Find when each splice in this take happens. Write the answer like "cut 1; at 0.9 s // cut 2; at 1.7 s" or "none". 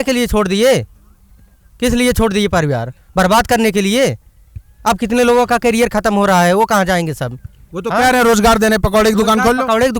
none